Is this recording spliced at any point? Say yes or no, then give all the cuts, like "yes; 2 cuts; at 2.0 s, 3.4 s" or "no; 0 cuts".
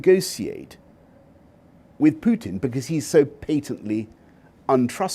no; 0 cuts